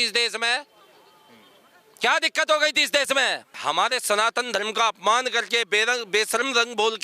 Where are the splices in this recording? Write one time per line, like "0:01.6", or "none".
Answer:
0:03.6